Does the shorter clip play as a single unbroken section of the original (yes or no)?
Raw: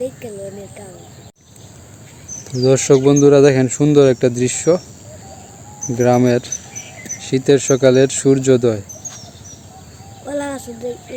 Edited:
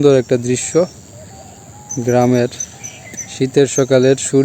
yes